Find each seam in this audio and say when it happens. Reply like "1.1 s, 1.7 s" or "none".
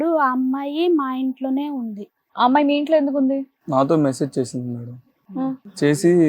3.6 s